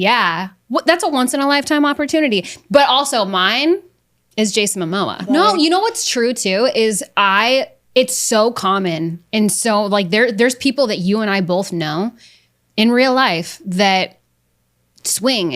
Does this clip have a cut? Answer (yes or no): yes